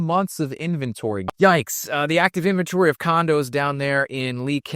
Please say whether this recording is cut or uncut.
cut